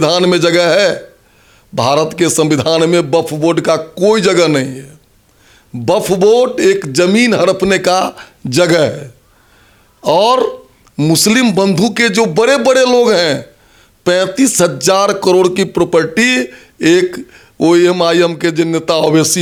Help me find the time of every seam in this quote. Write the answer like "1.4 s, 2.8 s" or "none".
none